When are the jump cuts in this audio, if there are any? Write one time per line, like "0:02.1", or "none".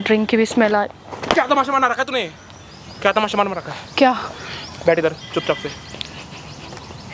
none